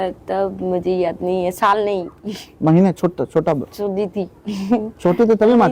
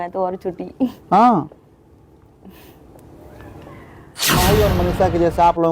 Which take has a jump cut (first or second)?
second